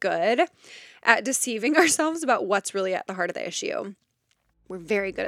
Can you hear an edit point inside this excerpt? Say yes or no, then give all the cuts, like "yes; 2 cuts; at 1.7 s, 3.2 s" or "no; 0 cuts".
no; 0 cuts